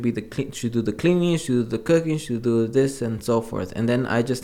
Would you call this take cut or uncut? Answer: uncut